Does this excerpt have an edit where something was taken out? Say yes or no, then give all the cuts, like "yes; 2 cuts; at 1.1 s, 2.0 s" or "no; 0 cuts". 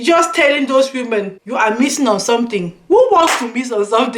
yes; 1 cut; at 1.4 s